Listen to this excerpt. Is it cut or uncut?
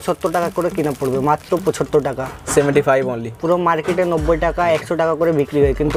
uncut